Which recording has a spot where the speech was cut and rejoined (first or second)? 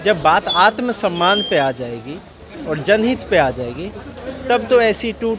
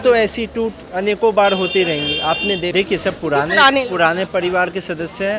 second